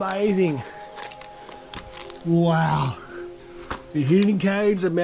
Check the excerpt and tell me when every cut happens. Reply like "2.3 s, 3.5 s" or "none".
none